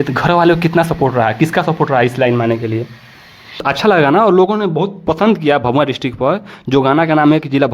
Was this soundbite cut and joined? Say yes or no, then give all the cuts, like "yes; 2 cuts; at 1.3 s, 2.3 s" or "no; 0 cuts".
yes; 1 cut; at 3.7 s